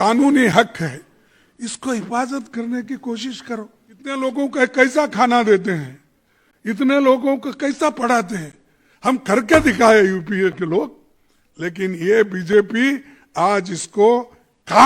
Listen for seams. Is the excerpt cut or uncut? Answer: cut